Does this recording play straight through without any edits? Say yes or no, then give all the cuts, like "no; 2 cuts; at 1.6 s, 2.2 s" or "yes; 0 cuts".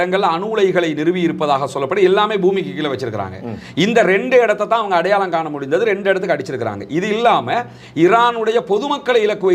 yes; 0 cuts